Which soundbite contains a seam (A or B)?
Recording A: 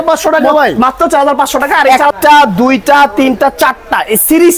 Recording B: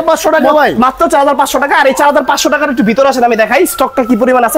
A